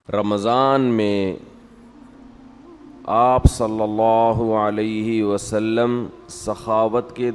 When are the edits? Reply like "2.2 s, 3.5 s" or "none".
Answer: none